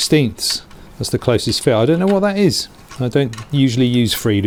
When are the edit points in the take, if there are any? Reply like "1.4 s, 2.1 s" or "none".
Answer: none